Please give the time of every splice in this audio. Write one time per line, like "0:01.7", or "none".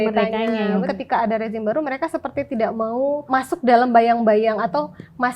0:00.9
0:03.2